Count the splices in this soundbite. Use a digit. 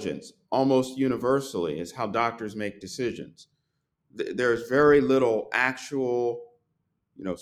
0